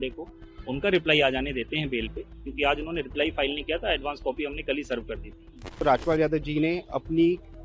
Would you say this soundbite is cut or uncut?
cut